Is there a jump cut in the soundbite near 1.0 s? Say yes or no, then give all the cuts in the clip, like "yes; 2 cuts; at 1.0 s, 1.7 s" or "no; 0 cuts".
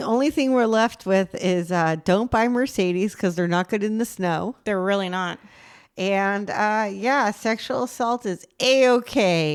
no; 0 cuts